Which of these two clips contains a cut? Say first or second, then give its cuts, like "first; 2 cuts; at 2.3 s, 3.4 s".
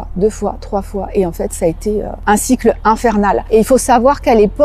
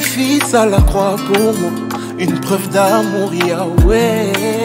first; 2 cuts; at 2.1 s, 3.4 s